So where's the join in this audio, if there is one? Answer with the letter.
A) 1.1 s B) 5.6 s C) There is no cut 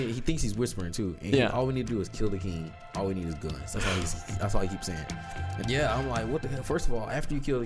B